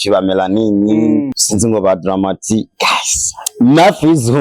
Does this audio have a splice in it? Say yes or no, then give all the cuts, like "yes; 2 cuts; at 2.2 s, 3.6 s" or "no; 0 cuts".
yes; 1 cut; at 1.4 s